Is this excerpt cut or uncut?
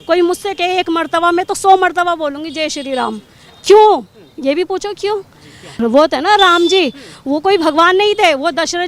uncut